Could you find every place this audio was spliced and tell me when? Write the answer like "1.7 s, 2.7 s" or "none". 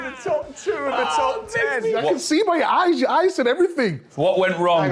1.9 s